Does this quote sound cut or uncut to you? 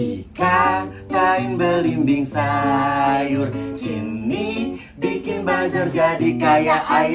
uncut